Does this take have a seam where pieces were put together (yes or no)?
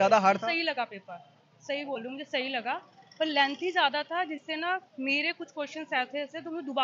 no